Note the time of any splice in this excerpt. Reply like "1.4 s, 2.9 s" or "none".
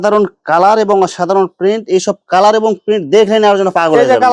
none